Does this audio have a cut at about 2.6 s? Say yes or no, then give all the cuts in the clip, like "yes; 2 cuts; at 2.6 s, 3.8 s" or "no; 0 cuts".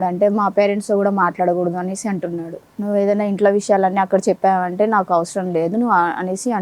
yes; 1 cut; at 2.6 s